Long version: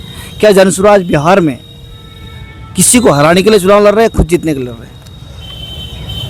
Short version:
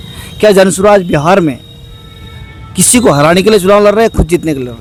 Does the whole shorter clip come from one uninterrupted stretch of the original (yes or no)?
yes